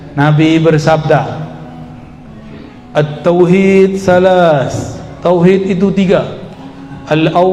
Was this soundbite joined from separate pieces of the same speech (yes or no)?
no